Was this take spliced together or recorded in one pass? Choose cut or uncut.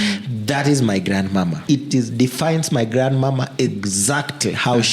cut